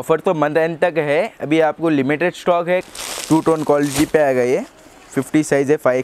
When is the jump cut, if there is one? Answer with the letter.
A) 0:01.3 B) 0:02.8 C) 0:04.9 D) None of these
B